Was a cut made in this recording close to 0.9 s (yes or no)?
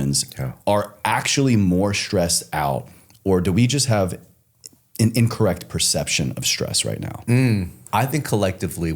no